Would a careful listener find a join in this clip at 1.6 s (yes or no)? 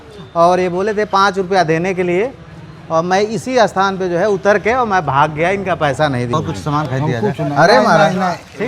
no